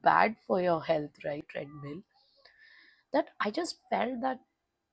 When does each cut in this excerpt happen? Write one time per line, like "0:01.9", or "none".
0:01.6